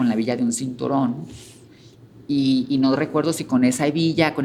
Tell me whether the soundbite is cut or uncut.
uncut